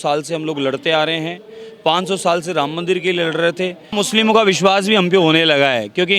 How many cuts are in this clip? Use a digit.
1